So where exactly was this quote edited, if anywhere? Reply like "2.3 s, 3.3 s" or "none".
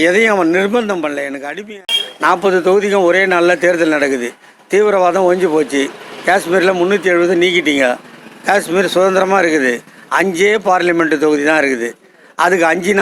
1.6 s